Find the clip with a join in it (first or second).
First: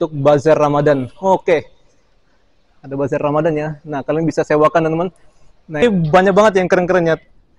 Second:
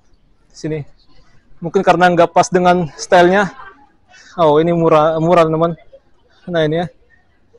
first